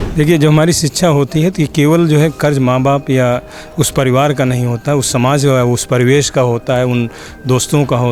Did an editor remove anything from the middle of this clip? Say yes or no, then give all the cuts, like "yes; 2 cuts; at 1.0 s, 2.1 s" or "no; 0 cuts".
no; 0 cuts